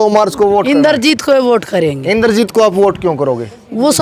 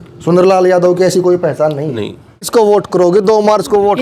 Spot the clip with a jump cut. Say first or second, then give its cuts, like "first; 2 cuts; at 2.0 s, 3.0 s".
second; 1 cut; at 2.4 s